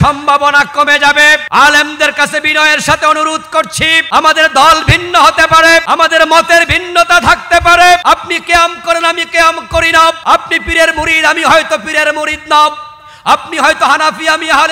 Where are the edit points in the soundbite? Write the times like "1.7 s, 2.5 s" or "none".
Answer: 1.4 s, 4.0 s, 5.9 s, 8.0 s, 10.2 s